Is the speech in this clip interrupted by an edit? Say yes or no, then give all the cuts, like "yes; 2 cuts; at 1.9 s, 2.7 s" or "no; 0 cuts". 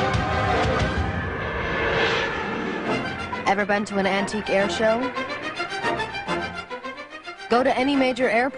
no; 0 cuts